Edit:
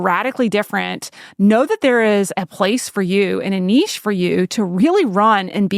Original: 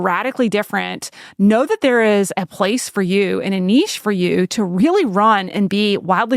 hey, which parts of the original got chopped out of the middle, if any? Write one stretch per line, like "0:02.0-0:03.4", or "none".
none